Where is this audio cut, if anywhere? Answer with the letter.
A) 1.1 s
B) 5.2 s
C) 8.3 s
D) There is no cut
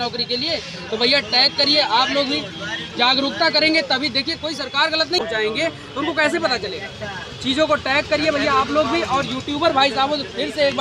B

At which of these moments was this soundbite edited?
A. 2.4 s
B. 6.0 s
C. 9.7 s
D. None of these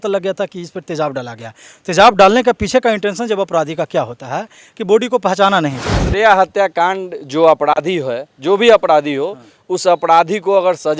B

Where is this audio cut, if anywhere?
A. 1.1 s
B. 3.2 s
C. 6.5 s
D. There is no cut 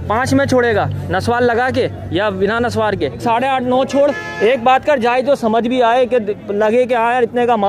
B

